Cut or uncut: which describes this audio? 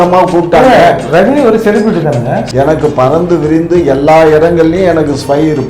cut